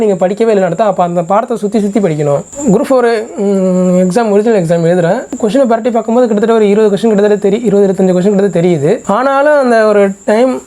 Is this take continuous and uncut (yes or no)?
no